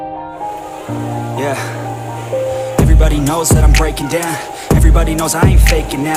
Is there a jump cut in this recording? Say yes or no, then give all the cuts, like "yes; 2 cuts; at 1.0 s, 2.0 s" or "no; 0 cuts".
no; 0 cuts